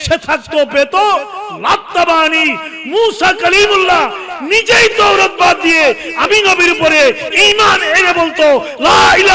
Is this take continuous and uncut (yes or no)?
yes